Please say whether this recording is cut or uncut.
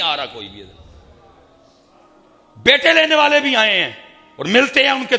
uncut